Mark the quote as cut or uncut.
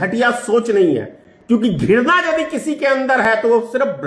uncut